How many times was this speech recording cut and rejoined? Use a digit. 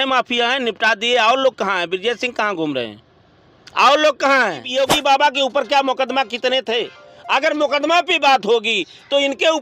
1